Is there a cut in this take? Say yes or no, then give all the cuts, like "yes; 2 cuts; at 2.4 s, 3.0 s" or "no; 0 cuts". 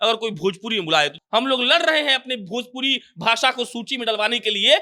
yes; 1 cut; at 1.2 s